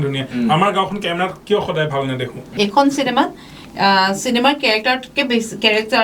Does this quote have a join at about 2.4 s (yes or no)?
yes